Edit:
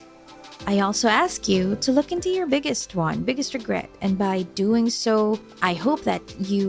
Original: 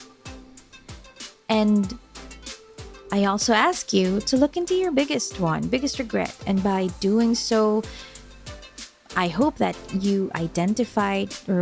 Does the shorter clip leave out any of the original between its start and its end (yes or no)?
yes